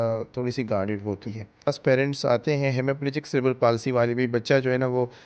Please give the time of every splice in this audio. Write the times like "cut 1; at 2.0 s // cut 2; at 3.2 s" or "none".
cut 1; at 1.7 s

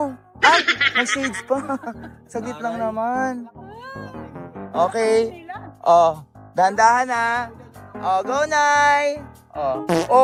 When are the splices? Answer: none

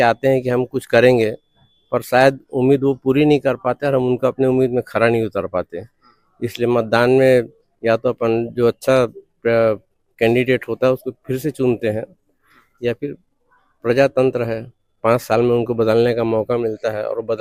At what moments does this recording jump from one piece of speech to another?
none

